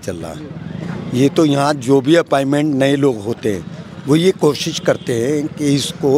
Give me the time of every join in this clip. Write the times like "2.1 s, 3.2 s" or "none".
none